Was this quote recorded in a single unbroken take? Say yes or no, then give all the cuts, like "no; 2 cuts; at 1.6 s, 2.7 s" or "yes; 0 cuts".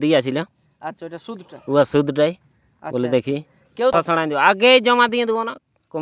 no; 1 cut; at 3.9 s